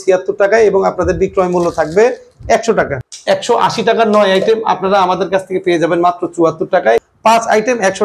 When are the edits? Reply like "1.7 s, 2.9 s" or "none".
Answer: 3.1 s, 7.0 s